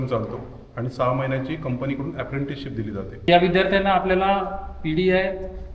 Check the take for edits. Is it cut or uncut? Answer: cut